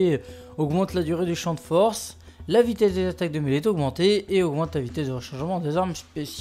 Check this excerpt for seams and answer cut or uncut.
cut